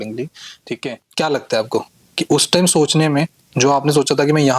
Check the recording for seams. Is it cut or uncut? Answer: cut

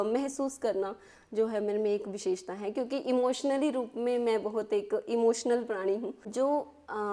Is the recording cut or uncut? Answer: cut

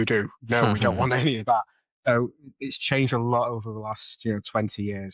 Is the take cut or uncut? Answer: uncut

